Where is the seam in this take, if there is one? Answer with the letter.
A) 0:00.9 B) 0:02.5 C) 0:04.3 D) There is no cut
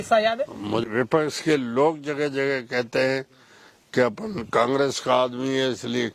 A